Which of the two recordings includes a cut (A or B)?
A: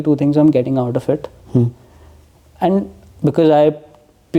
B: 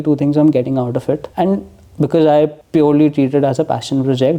B